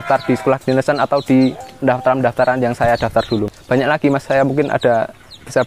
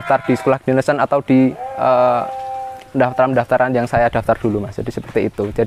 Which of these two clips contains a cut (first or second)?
first